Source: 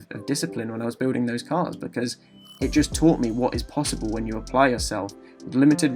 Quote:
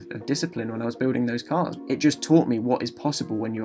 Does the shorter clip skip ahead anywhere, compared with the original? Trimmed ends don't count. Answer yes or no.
yes